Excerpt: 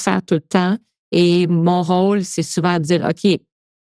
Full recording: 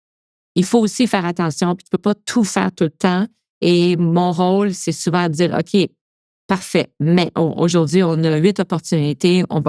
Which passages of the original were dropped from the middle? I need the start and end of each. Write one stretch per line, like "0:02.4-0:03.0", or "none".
none